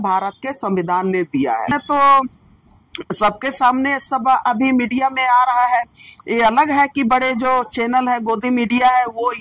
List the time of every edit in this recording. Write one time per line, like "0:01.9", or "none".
0:01.7